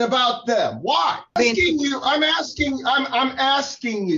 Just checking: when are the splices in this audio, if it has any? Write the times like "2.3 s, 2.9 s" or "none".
1.3 s